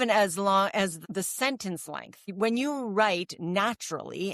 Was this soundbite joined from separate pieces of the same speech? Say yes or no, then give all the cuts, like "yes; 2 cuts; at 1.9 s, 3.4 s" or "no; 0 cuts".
yes; 2 cuts; at 1.0 s, 2.2 s